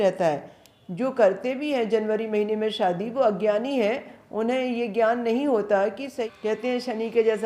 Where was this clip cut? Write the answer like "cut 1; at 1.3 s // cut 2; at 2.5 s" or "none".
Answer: cut 1; at 6.2 s

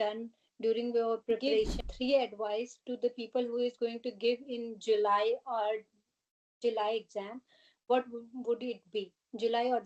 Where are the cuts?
cut 1; at 1.8 s

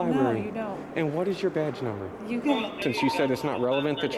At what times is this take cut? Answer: cut 1; at 2.8 s

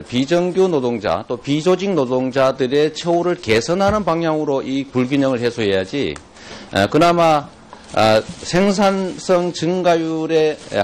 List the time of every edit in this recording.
cut 1; at 7.5 s

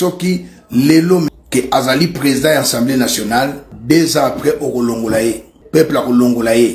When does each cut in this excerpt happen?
cut 1; at 1.3 s // cut 2; at 3.7 s // cut 3; at 5.5 s

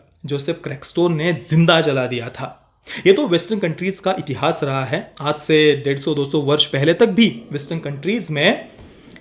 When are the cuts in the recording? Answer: none

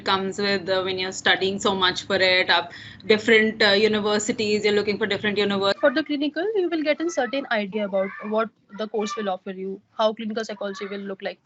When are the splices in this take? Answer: cut 1; at 5.8 s

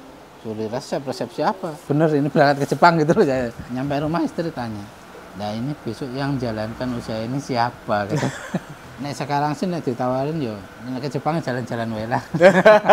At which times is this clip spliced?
cut 1; at 1.7 s // cut 2; at 3.6 s // cut 3; at 8.8 s // cut 4; at 10.7 s

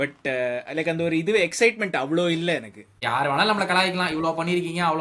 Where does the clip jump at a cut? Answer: cut 1; at 3.0 s

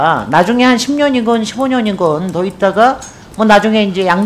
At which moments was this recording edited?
none

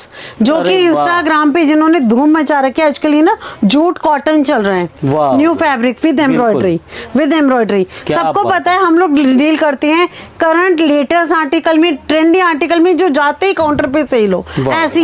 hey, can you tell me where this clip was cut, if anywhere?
none

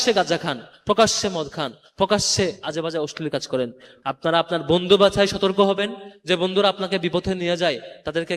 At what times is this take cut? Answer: cut 1; at 3.9 s

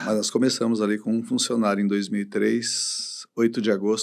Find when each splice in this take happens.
none

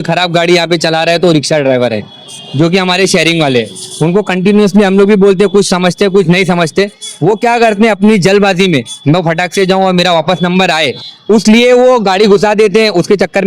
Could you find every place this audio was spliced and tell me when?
none

